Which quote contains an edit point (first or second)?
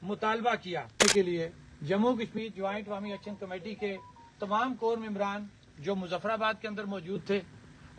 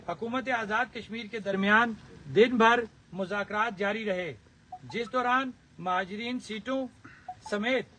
first